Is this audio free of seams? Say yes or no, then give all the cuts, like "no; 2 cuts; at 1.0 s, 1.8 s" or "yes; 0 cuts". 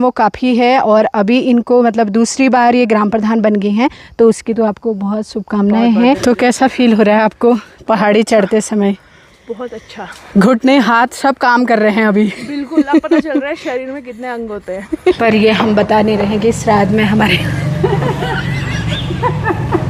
no; 2 cuts; at 6.2 s, 15.2 s